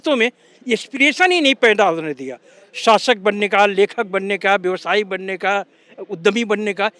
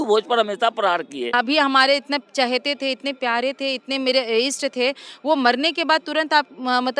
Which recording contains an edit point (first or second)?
second